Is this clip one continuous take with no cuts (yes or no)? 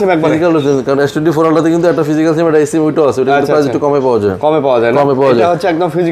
yes